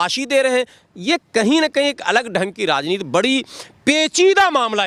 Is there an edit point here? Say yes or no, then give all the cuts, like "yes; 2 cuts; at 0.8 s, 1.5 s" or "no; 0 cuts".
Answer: no; 0 cuts